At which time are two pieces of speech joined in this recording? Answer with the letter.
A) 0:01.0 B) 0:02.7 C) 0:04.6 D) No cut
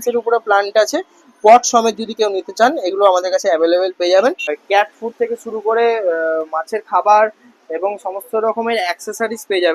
C